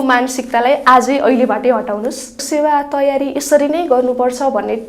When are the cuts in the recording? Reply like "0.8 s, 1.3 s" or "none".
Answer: 2.4 s